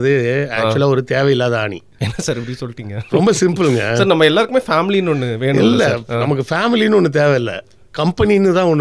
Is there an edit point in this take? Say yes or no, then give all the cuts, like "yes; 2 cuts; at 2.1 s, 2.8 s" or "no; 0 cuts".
no; 0 cuts